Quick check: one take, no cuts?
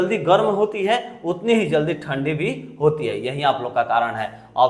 yes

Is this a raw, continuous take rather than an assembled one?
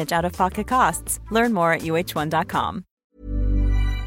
no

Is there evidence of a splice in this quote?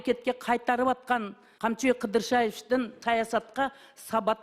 yes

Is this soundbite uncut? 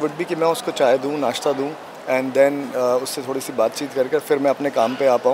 yes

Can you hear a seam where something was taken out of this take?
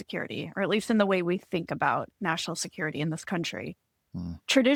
no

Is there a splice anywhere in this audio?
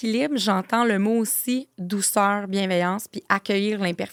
no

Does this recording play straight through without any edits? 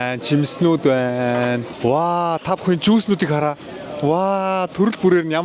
yes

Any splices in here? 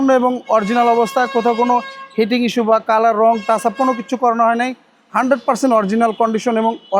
no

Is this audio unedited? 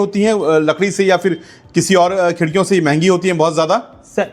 yes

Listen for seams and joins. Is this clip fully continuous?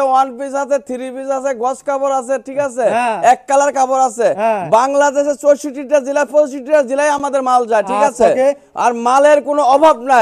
yes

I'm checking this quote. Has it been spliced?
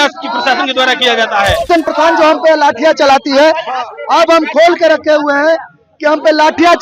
yes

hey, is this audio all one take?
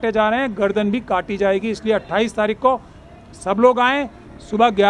yes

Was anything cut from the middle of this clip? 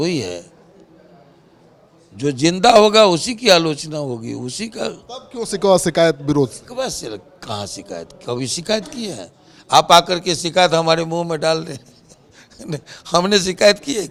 no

